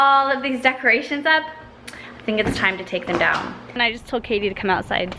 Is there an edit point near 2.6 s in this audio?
no; 1 cut; at 3.8 s

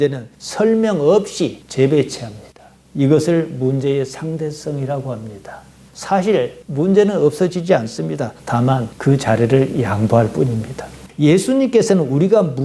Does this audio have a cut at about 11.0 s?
yes; 2 cuts; at 5.8 s, 11.0 s

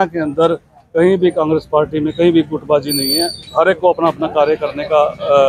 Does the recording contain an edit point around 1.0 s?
no; 0 cuts

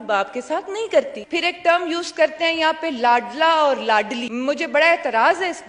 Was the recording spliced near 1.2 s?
yes; 2 cuts; at 1.2 s, 4.2 s

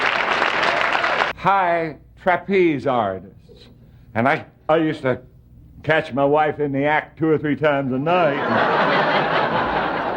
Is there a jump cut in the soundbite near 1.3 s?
yes; 1 cut; at 1.3 s

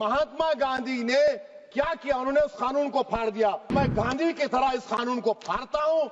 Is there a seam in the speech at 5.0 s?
no; 1 cut; at 3.7 s

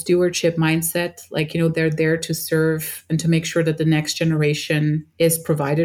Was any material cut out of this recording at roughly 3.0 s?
no; 0 cuts

